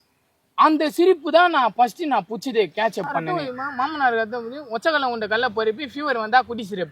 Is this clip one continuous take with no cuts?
no; 1 cut; at 3.3 s

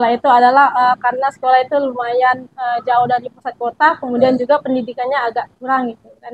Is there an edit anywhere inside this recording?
no; 0 cuts

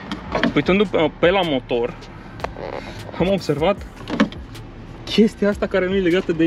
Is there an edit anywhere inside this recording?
no; 0 cuts

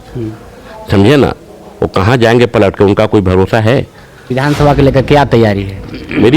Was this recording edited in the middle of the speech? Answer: yes; 1 cut; at 4.2 s

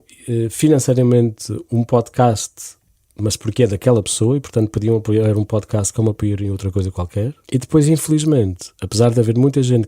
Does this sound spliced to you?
yes; 1 cut; at 7.4 s

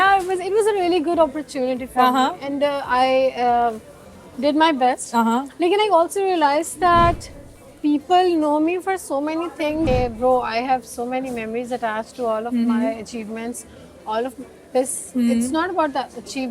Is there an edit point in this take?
yes; 1 cut; at 9.9 s

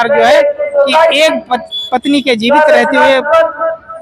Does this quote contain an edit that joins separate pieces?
no; 0 cuts

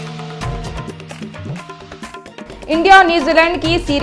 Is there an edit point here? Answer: yes; 1 cut; at 2.0 s

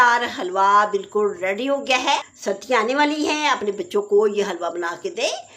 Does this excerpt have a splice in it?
yes; 1 cut; at 2.3 s

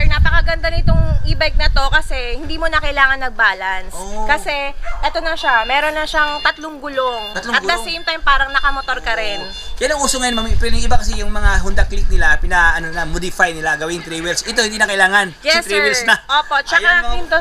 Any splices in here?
no; 0 cuts

